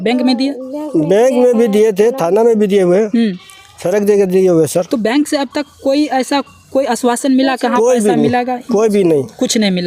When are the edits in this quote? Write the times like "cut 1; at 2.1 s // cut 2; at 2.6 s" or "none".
none